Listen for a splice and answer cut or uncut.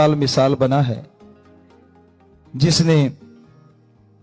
cut